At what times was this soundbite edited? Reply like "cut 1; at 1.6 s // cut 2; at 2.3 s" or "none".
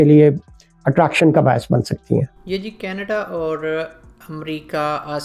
none